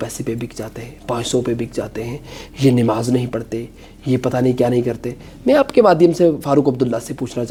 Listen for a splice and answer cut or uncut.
uncut